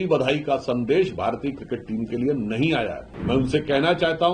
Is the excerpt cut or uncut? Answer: cut